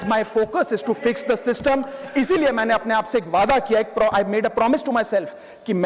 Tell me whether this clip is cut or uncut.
uncut